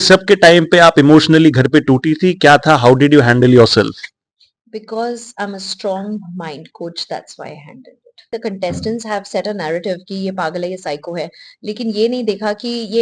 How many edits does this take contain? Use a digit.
1